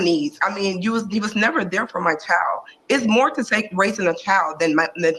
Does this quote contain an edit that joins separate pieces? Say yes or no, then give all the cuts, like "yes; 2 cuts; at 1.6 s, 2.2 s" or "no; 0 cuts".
no; 0 cuts